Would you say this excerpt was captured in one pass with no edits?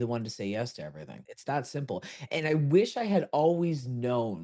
yes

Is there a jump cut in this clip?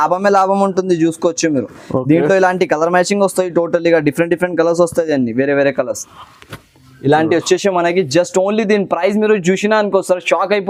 no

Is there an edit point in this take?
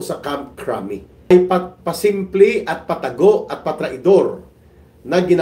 yes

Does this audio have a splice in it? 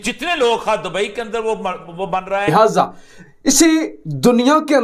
yes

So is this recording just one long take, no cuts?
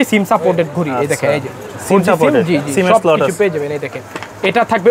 yes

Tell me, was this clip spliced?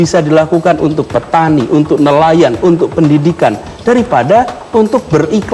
no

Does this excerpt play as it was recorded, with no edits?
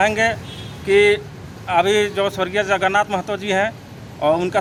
yes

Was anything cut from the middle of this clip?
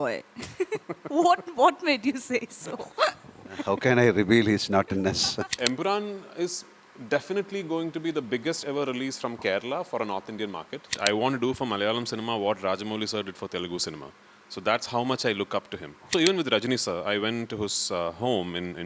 yes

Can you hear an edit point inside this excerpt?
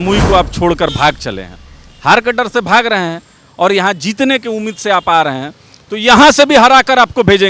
no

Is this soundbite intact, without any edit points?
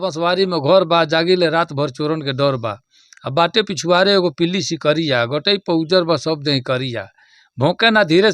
yes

